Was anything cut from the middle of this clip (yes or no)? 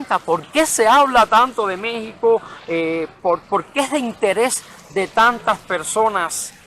no